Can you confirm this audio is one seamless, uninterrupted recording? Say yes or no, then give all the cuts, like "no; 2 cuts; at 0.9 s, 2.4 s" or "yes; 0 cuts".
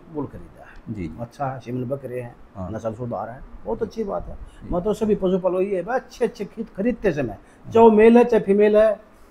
yes; 0 cuts